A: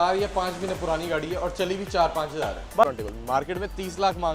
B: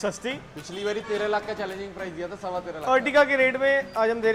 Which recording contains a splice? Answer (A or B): A